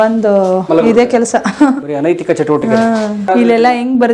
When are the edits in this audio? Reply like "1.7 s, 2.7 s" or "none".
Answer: none